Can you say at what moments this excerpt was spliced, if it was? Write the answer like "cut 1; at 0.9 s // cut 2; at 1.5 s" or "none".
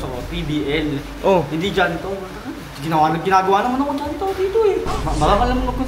cut 1; at 5.0 s